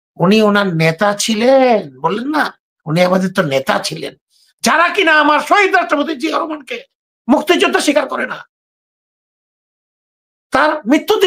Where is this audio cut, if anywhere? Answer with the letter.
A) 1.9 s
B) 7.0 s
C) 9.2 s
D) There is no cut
D